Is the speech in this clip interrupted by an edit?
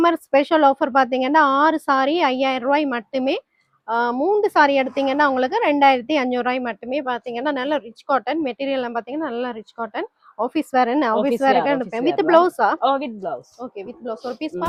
no; 0 cuts

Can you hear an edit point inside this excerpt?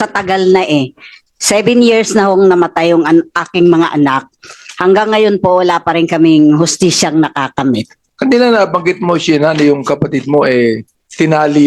yes; 1 cut; at 8.0 s

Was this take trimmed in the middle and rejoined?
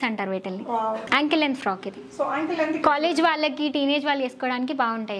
yes; 1 cut; at 1.1 s

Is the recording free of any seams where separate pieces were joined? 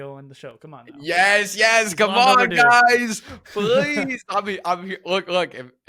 yes; 0 cuts

